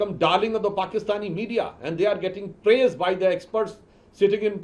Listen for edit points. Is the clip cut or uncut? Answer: uncut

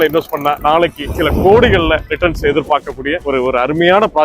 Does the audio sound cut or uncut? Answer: cut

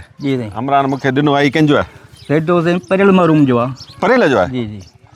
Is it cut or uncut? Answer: uncut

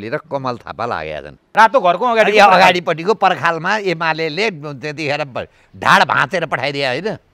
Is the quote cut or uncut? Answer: cut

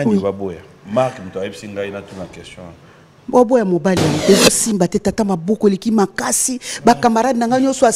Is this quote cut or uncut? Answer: cut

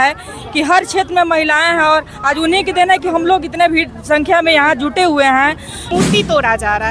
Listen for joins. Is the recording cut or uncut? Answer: cut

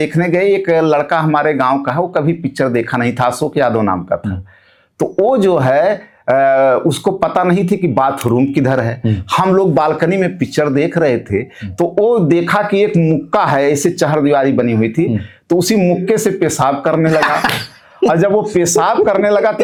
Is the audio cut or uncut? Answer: uncut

